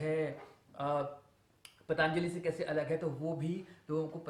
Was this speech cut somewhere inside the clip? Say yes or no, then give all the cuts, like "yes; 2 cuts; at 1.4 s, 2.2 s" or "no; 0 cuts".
no; 0 cuts